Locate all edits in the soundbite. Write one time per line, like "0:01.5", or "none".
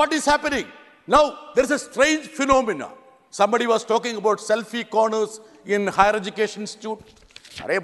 none